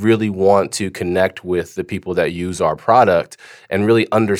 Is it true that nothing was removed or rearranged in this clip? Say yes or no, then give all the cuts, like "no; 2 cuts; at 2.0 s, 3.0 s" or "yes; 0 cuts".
yes; 0 cuts